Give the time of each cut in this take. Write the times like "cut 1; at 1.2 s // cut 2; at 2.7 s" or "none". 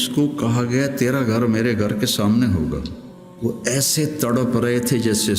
cut 1; at 3.2 s